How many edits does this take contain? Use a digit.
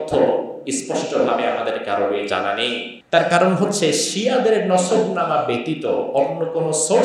1